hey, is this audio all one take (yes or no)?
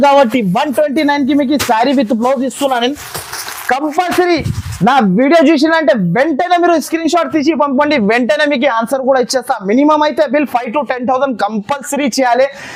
yes